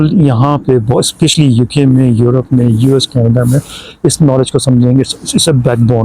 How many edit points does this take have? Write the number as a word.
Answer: zero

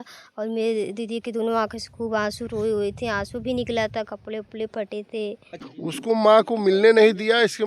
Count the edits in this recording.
one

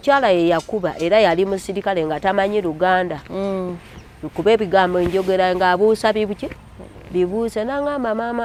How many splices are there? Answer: zero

